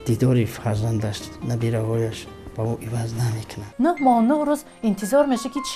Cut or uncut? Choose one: cut